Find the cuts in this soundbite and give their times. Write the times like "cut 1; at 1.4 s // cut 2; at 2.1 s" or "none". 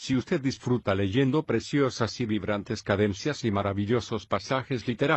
cut 1; at 3.2 s